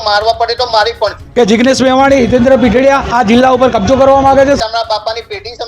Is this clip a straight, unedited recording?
no; 2 cuts; at 1.2 s, 4.6 s

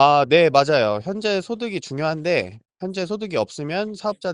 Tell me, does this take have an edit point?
no; 0 cuts

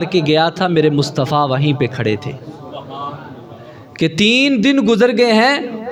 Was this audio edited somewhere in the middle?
no; 0 cuts

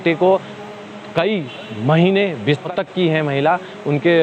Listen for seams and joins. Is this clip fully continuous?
no; 1 cut; at 2.7 s

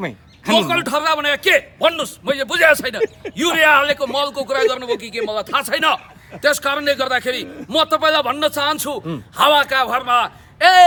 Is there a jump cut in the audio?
no; 0 cuts

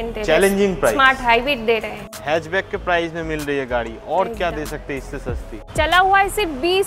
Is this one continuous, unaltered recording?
no; 2 cuts; at 2.0 s, 5.5 s

